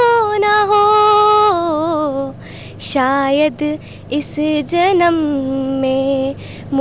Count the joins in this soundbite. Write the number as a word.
zero